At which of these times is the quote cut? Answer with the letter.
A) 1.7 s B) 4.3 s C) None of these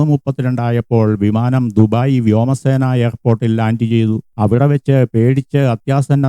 B